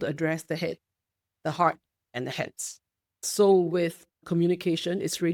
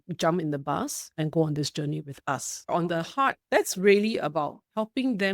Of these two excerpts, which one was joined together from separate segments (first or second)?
second